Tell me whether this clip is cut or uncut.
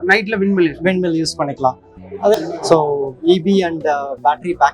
cut